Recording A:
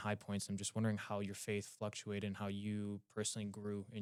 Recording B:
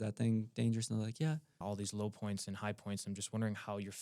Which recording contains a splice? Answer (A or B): B